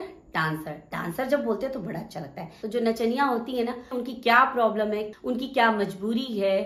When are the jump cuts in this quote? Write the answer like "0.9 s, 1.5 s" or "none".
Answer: 2.5 s, 3.9 s, 5.1 s